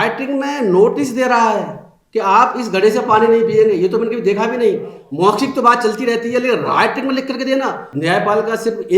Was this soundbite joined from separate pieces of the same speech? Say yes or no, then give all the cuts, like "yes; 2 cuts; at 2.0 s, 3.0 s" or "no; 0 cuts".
yes; 1 cut; at 7.9 s